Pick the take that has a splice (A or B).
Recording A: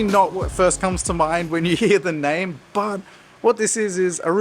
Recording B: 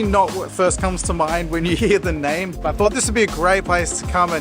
B